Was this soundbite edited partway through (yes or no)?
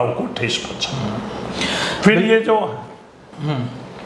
no